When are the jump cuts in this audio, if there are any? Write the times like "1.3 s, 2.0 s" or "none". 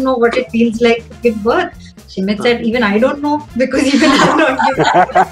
1.8 s